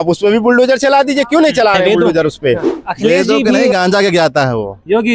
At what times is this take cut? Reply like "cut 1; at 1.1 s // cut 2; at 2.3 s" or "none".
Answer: cut 1; at 3.7 s